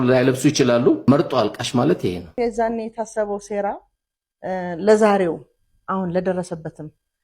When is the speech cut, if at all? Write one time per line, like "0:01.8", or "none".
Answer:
0:01.1
0:02.4

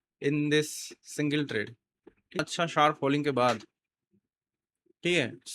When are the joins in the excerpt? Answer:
0:02.4

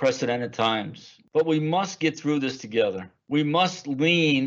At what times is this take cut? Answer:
none

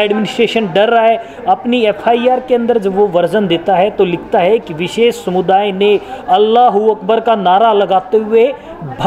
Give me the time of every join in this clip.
none

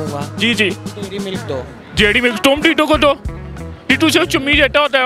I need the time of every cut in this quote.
none

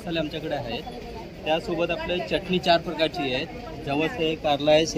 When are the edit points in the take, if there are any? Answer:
none

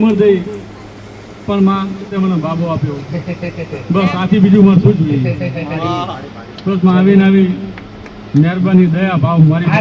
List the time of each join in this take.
0:02.1

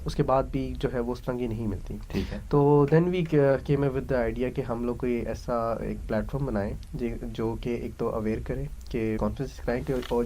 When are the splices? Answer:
0:09.2

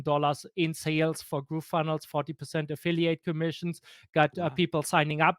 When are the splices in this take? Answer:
none

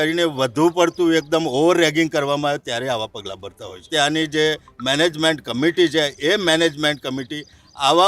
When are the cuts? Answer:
0:03.9

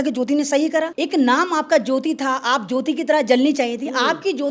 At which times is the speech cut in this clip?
0:01.0

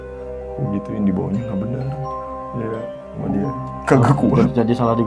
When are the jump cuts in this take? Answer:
none

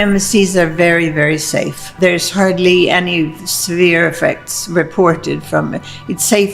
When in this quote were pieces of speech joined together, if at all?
0:01.9

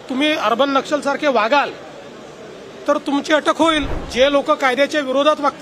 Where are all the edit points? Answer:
0:04.0

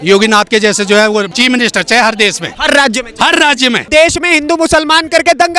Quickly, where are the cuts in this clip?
0:01.3
0:02.5
0:03.8

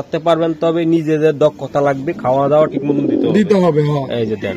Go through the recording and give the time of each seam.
none

